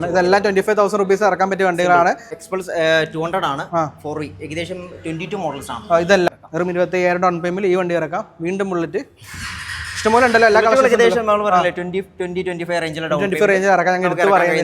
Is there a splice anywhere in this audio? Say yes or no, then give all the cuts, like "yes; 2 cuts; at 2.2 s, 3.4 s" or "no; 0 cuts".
yes; 2 cuts; at 2.4 s, 6.3 s